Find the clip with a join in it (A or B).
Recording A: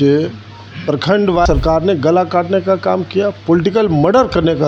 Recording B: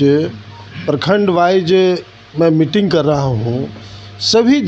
A